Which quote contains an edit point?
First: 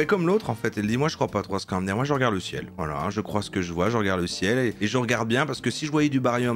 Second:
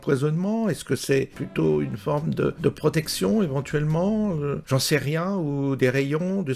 second; 3 cuts; at 1.4 s, 2.6 s, 4.6 s

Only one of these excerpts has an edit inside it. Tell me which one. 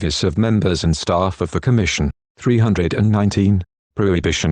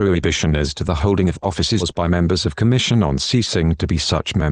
first; 1 cut; at 2.2 s

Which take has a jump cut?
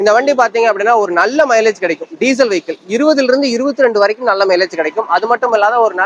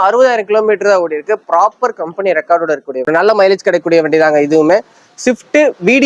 second; 1 cut; at 3.1 s

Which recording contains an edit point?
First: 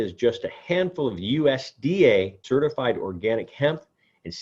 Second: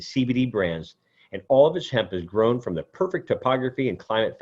first; 1 cut; at 2.4 s

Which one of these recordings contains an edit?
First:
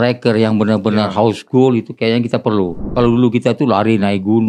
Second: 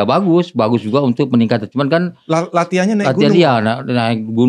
first; 1 cut; at 2.9 s

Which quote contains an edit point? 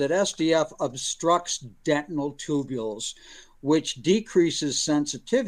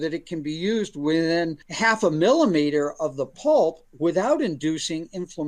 second; 1 cut; at 1.6 s

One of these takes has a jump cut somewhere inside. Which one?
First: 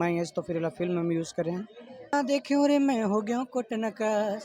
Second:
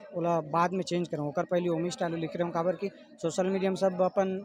first; 1 cut; at 2.1 s

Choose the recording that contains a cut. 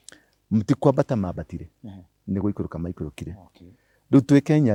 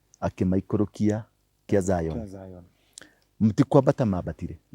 second; 1 cut; at 1.6 s

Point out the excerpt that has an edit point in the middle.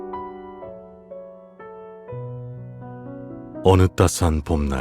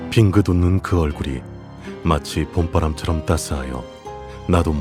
first; 1 cut; at 3.6 s

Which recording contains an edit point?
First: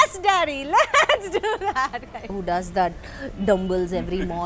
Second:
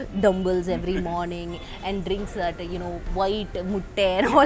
first; 1 cut; at 2.3 s

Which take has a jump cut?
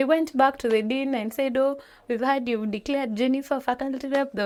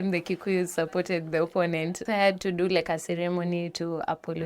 second; 1 cut; at 2.0 s

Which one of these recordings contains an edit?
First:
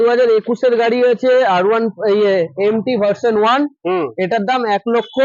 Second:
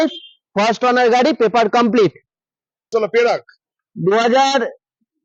second; 1 cut; at 2.9 s

